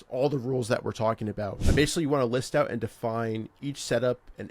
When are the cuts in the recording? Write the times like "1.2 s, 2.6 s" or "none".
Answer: 1.6 s